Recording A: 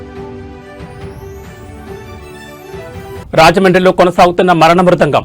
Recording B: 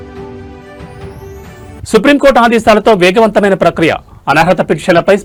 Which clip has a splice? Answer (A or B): A